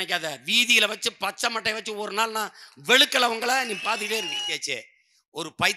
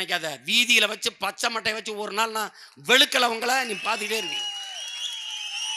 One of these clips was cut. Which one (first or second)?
first